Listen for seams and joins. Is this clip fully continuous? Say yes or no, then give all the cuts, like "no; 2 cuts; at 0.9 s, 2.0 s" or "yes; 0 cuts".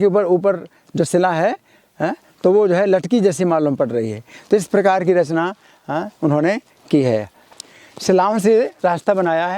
no; 1 cut; at 7.4 s